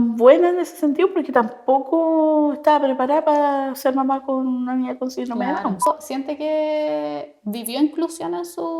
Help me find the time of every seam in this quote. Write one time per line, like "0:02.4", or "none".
0:05.9